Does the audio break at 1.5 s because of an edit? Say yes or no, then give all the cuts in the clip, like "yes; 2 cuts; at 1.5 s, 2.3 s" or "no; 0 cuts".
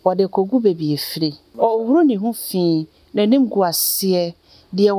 yes; 1 cut; at 1.5 s